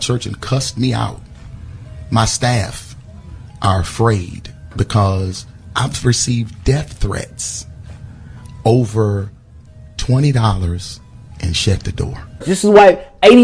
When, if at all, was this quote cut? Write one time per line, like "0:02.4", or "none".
0:12.5